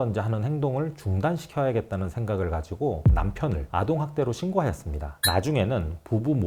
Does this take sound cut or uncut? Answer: cut